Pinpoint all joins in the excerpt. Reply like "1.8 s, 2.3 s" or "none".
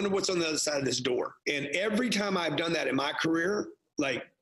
1.3 s